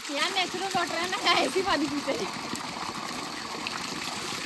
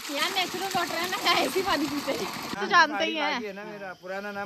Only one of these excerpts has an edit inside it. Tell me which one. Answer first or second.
second